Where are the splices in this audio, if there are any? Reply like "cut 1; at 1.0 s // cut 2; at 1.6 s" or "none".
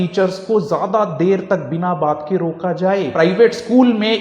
cut 1; at 3.1 s

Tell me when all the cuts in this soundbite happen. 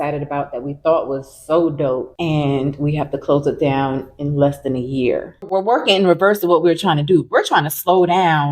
cut 1; at 5.4 s

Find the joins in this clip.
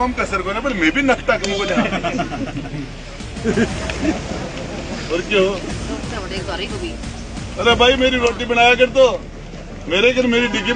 cut 1; at 3.6 s

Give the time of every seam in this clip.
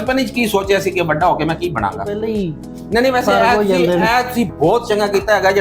cut 1; at 2.2 s

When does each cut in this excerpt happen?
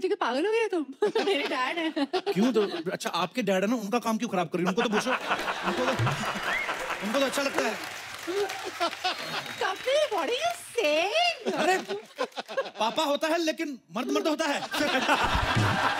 none

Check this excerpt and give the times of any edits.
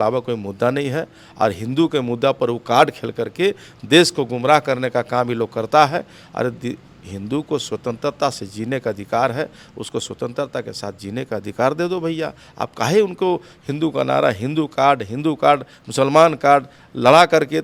none

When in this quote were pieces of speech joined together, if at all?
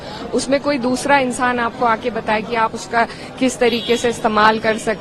none

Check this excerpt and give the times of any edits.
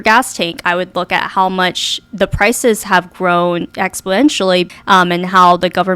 cut 1; at 4.8 s

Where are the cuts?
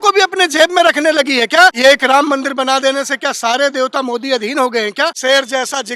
cut 1; at 1.8 s // cut 2; at 5.2 s

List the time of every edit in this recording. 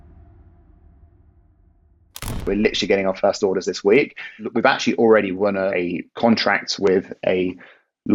cut 1; at 2.4 s // cut 2; at 4.4 s // cut 3; at 5.7 s

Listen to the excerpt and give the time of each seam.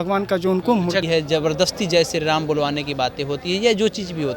cut 1; at 1.0 s

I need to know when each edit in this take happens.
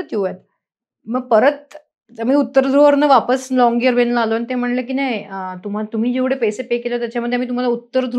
none

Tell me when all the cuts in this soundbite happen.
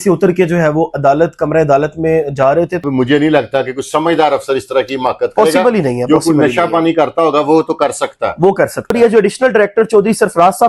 cut 1; at 2.8 s // cut 2; at 8.9 s

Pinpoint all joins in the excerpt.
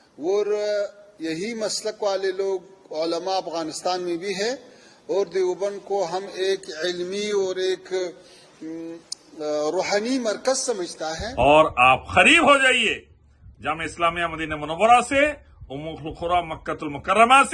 cut 1; at 11.2 s

